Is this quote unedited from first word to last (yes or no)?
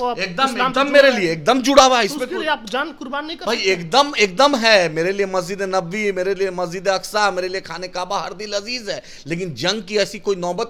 yes